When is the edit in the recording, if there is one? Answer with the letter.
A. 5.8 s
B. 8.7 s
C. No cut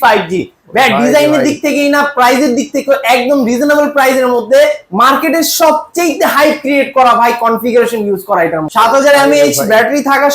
B